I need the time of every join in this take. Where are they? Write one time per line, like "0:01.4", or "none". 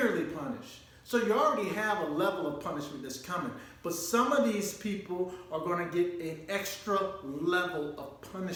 none